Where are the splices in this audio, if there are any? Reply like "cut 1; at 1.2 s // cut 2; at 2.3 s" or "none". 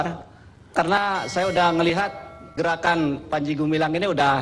cut 1; at 0.7 s // cut 2; at 2.5 s